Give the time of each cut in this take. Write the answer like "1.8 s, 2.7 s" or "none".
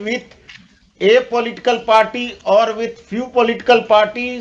none